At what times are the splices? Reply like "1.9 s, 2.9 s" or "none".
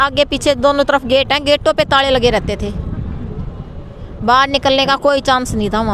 none